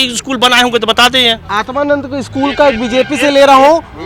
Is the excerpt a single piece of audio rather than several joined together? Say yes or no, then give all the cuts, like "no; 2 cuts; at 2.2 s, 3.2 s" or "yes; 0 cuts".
yes; 0 cuts